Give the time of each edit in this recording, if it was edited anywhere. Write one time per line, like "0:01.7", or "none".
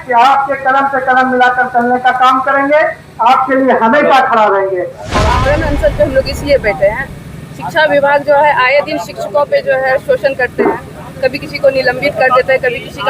0:05.4

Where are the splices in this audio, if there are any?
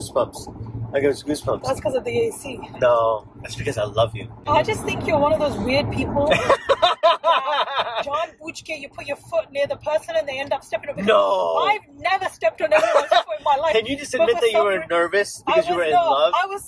0:04.4

